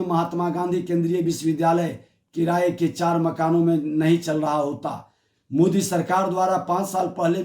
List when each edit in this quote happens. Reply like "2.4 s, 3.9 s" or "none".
none

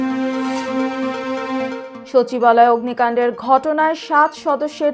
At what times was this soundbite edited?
1.9 s

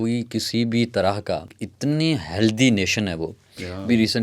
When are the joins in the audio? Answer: 1.6 s

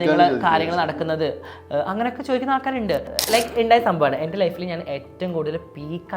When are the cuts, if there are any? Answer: 3.1 s

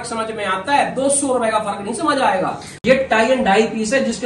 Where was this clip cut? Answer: 2.7 s

